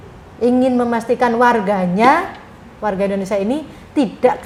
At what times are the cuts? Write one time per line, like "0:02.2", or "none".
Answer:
none